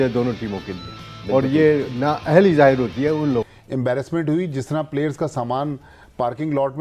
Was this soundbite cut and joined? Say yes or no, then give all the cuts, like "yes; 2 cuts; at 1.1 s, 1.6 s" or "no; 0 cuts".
yes; 1 cut; at 3.6 s